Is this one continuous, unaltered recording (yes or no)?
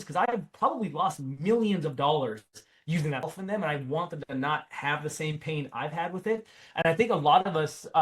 no